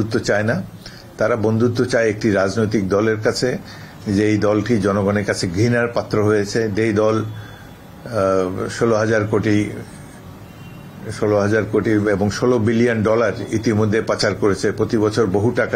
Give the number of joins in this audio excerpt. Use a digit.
0